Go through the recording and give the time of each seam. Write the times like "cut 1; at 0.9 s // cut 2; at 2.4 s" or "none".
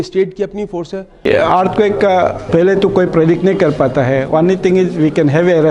cut 1; at 1.2 s // cut 2; at 2.4 s